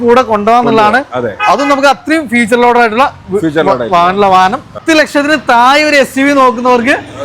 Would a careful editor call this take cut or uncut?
cut